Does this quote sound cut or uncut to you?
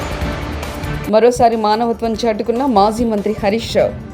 cut